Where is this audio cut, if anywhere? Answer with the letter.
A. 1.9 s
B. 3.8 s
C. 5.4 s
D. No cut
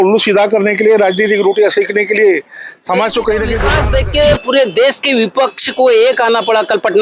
B